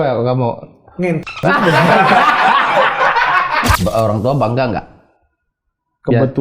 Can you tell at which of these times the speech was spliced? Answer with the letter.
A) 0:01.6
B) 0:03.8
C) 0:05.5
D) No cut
B